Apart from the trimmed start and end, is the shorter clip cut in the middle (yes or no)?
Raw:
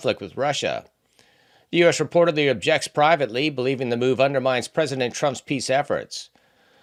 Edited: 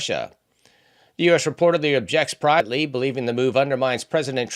yes